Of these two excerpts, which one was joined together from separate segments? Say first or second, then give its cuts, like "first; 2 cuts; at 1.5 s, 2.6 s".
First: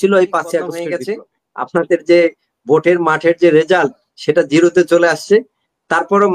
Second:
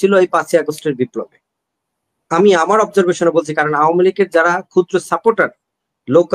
first; 1 cut; at 1.0 s